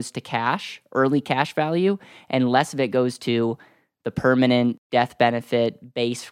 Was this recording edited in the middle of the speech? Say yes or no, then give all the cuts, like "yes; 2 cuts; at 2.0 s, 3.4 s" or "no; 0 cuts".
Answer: yes; 1 cut; at 4.8 s